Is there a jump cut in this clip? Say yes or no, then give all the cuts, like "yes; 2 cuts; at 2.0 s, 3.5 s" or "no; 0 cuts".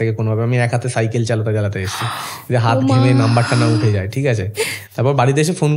no; 0 cuts